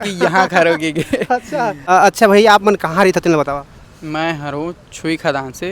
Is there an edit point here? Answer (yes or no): yes